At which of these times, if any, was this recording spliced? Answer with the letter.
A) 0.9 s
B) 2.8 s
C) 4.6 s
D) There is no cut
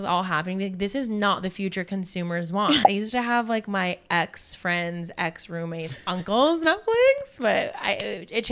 B